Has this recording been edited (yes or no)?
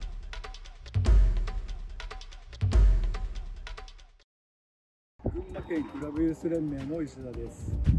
yes